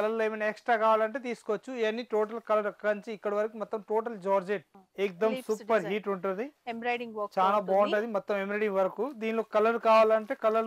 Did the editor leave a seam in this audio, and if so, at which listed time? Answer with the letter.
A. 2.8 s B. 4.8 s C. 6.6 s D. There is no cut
B